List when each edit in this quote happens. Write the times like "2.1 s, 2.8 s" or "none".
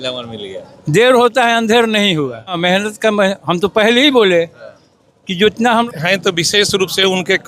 2.6 s, 5.9 s